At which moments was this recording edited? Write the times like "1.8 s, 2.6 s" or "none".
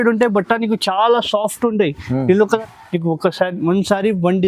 2.7 s